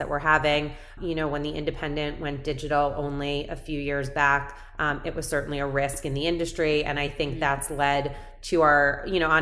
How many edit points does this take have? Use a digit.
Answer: 1